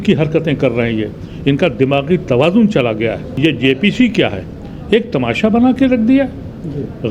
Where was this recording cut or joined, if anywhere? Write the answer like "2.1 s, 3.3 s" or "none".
3.3 s